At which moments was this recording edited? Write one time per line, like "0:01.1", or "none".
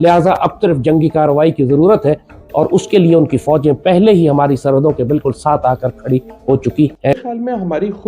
0:07.1